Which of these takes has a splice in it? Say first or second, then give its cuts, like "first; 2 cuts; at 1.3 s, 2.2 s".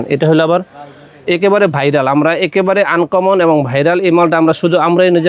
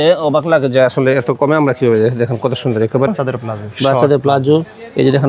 second; 1 cut; at 3.1 s